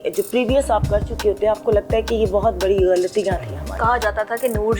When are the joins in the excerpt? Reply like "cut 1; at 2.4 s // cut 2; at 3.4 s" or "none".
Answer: cut 1; at 3.8 s